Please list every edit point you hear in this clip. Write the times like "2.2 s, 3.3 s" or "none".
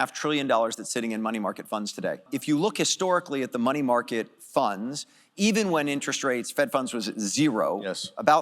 2.2 s